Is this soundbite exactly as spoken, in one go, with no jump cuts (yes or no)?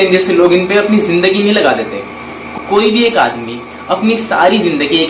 no